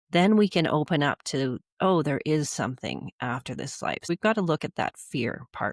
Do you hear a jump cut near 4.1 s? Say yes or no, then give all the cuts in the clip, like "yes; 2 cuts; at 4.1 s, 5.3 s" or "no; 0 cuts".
yes; 1 cut; at 4.1 s